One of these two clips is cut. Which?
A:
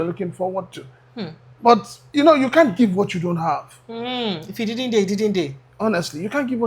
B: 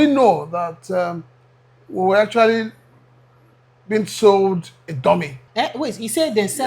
B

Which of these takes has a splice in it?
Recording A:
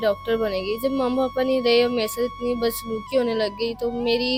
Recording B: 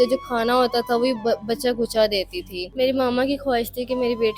B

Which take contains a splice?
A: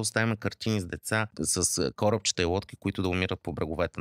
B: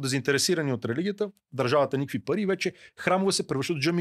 A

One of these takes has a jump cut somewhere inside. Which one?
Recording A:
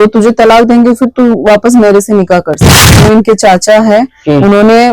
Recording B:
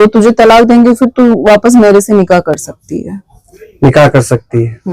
A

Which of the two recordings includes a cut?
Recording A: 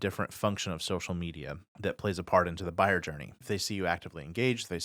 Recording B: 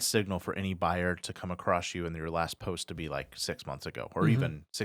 A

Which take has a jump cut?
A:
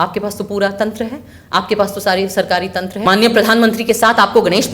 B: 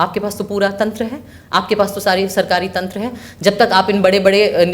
A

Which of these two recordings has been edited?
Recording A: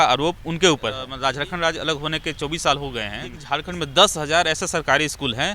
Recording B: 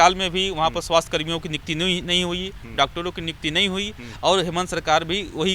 A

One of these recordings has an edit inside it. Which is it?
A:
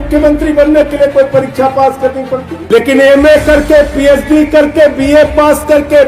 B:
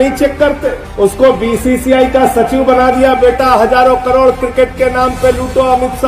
A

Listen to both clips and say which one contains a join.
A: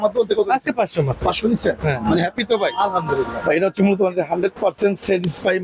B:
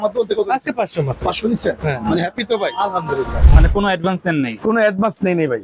B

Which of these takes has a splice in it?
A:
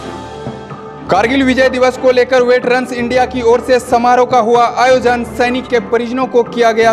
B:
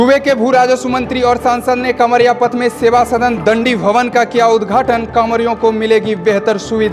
A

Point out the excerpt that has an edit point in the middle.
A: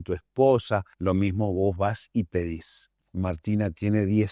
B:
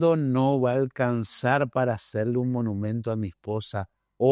A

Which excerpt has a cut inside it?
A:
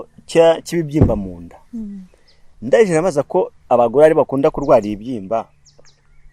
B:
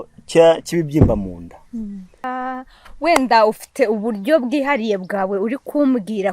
B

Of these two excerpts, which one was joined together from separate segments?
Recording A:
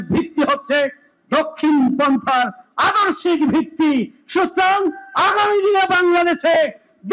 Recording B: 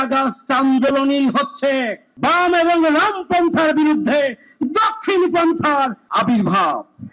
B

